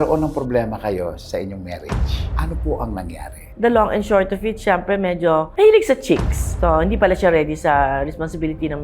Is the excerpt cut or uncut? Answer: cut